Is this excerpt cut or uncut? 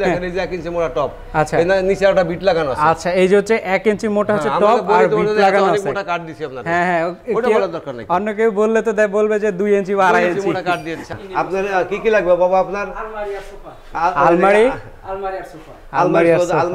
cut